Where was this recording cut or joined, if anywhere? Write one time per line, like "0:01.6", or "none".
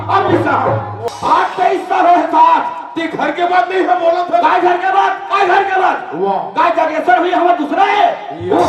0:01.0